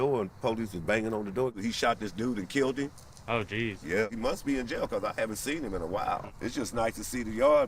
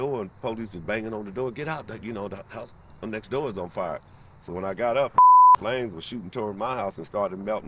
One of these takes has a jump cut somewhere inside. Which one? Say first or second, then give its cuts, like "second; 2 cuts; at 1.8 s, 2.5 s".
first; 3 cuts; at 1.6 s, 4.1 s, 6.3 s